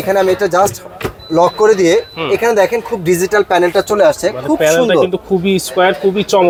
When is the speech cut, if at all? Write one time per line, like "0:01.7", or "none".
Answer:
none